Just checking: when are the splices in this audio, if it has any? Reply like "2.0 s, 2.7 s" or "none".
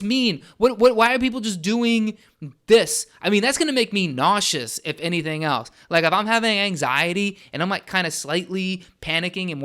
none